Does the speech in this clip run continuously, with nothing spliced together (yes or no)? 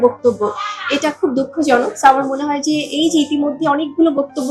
yes